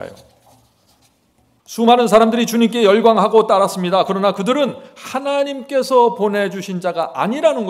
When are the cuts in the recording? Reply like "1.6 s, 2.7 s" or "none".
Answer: 1.6 s